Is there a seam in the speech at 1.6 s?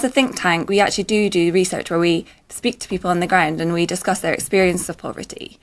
no; 1 cut; at 4.0 s

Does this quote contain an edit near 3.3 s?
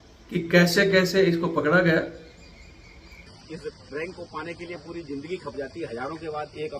yes; 1 cut; at 3.3 s

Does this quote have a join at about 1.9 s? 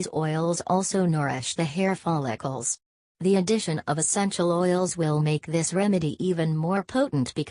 no; 1 cut; at 6.6 s

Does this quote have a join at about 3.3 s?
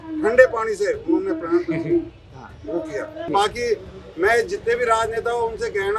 yes; 1 cut; at 3.3 s

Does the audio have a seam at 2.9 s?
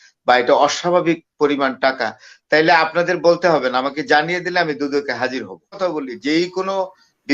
no; 1 cut; at 5.8 s

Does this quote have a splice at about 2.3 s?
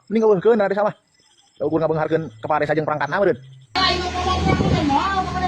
no; 1 cut; at 3.8 s

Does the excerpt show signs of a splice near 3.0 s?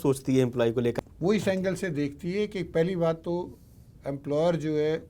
no; 1 cut; at 1.0 s

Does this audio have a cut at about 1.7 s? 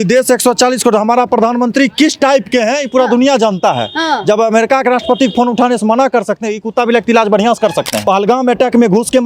no; 1 cut; at 8.0 s

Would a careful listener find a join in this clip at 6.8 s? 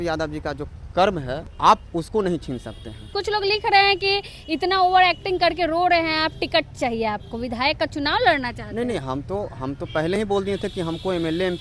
no; 2 cuts; at 1.5 s, 3.1 s

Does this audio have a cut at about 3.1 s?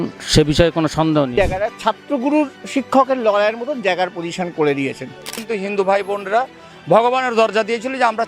no; 2 cuts; at 1.3 s, 5.3 s

